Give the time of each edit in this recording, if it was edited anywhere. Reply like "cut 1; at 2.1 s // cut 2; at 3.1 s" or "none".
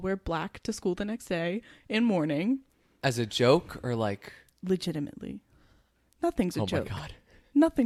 none